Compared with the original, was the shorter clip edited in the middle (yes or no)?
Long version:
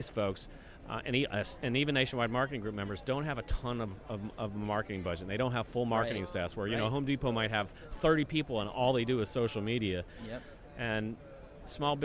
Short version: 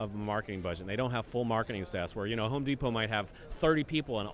no